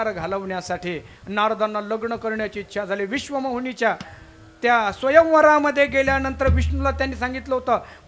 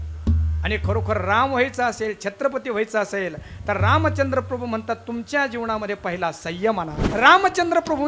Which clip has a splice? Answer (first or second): second